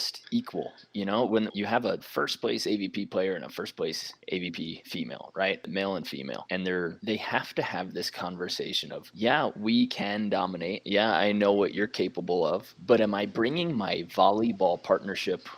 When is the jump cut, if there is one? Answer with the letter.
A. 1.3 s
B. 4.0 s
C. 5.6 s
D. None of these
C